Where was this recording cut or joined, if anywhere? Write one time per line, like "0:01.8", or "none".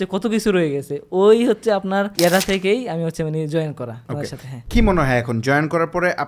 0:02.1
0:04.2